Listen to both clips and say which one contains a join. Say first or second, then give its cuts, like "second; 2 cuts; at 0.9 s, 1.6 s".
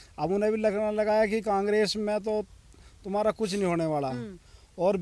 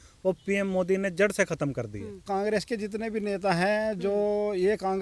second; 1 cut; at 2.1 s